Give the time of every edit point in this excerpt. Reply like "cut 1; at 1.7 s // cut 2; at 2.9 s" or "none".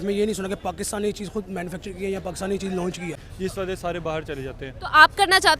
cut 1; at 3.1 s